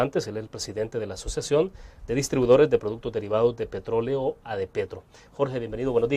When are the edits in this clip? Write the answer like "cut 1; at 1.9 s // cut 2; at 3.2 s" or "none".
cut 1; at 1.2 s